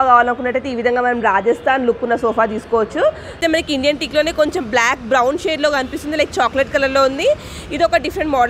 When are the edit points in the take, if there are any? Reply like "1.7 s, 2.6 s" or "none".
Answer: 3.3 s